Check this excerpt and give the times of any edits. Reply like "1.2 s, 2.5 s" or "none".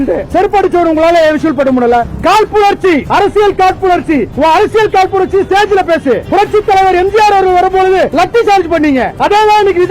2.1 s, 3.1 s, 4.3 s, 6.2 s